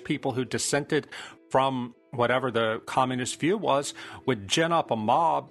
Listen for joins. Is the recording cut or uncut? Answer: uncut